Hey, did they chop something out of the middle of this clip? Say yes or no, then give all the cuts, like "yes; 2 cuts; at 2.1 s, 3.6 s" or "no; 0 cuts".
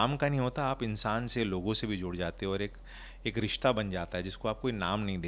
no; 0 cuts